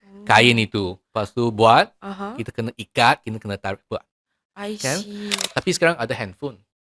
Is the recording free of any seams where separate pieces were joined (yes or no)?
no